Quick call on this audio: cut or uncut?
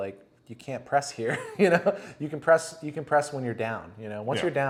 uncut